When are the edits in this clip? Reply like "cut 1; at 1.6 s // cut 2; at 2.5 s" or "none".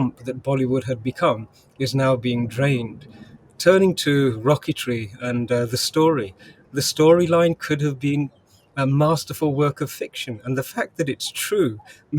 none

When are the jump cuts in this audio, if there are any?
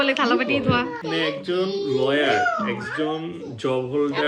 cut 1; at 1.0 s

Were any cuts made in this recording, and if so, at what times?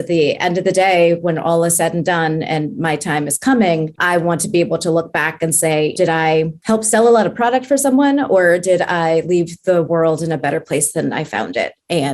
cut 1; at 4.0 s // cut 2; at 6.2 s

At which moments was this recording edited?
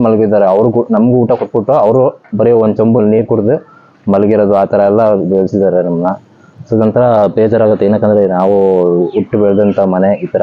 none

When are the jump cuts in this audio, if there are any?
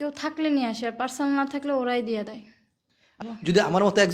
cut 1; at 3.2 s

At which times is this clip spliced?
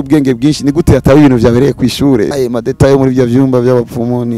cut 1; at 2.3 s

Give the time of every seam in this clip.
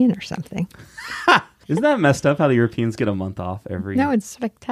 cut 1; at 1.5 s

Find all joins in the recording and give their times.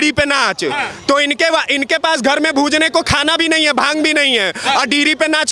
none

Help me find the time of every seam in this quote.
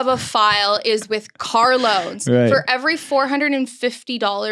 none

